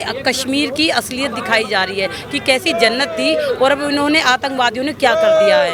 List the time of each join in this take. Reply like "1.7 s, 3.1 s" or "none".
none